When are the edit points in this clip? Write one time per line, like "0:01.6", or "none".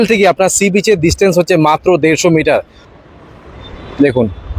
0:02.8